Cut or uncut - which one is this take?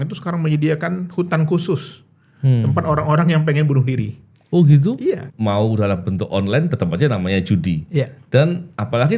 cut